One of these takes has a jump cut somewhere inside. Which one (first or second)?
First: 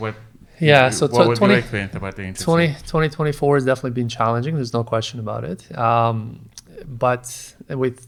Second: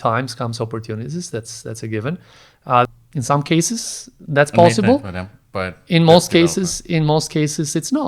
second